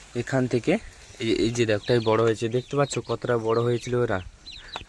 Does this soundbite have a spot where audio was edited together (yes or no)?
yes